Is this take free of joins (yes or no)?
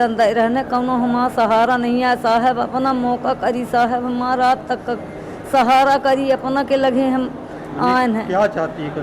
yes